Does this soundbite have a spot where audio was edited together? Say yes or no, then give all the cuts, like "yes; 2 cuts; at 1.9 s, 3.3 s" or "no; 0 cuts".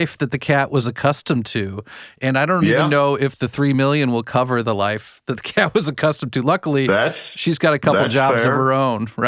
no; 0 cuts